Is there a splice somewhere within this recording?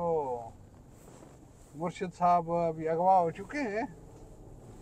no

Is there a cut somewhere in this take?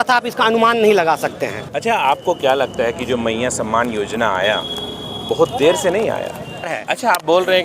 yes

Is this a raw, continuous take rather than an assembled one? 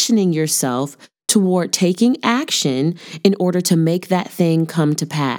yes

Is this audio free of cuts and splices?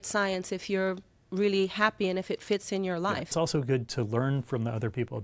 no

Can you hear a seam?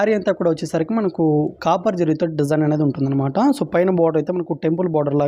no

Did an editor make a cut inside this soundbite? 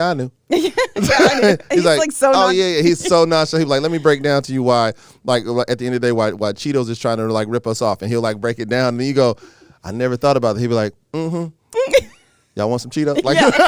no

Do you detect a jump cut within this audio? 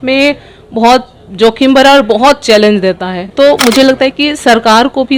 yes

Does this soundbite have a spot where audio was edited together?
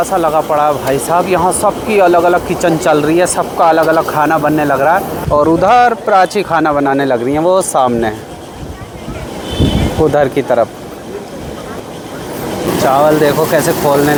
no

